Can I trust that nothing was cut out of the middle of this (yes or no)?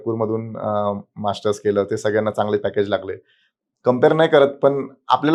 yes